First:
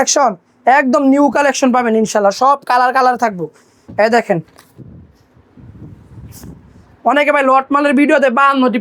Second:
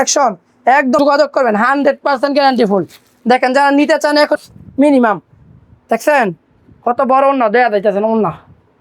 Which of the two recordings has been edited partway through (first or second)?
second